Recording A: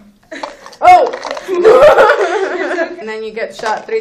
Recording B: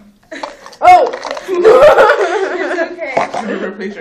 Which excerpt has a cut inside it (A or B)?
B